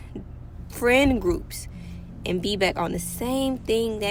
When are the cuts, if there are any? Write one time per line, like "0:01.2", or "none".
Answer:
none